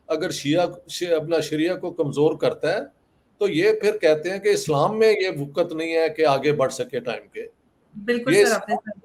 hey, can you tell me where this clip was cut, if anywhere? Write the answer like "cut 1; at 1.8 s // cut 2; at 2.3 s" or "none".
none